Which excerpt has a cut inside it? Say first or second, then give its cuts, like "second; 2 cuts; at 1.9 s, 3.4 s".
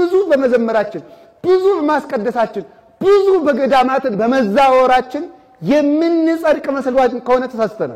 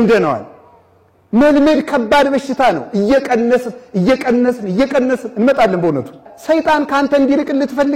second; 1 cut; at 6.3 s